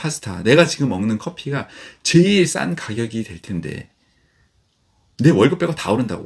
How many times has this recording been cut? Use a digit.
0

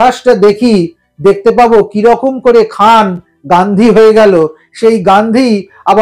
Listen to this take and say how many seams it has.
0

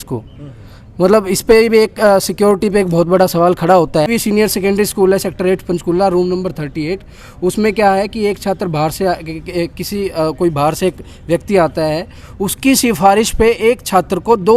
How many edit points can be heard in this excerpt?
1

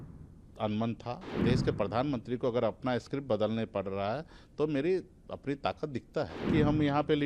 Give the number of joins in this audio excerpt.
2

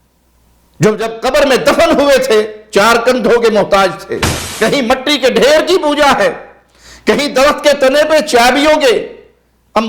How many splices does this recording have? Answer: 1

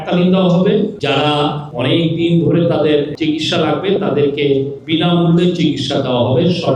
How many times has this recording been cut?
3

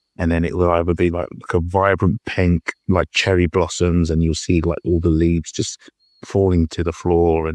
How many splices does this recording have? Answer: 0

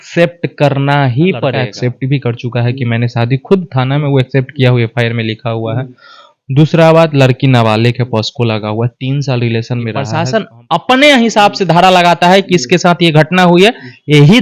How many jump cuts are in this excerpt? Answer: 2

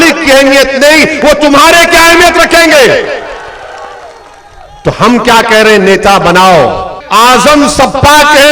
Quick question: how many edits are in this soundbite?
1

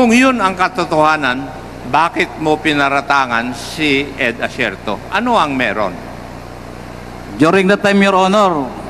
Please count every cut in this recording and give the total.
0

